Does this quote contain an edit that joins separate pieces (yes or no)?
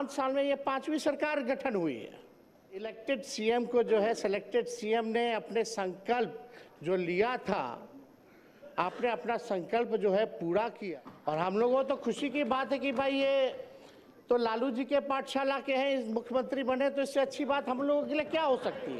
yes